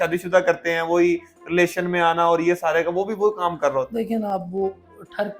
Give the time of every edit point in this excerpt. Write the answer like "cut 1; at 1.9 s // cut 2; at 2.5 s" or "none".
none